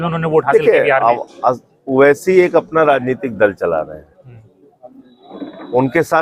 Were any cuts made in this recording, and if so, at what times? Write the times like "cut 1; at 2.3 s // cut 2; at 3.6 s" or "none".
none

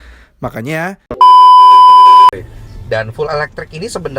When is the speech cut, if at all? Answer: cut 1; at 1.1 s // cut 2; at 2.3 s

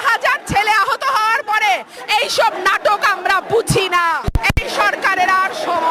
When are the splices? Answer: cut 1; at 4.3 s

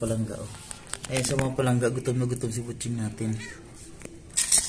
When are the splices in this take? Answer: none

